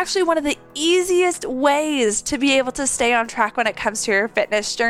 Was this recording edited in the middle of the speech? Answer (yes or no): no